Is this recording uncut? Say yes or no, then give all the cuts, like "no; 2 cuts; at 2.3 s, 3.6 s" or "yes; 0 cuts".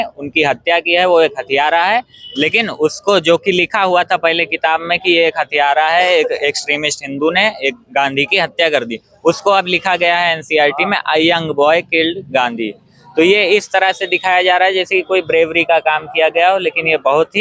yes; 0 cuts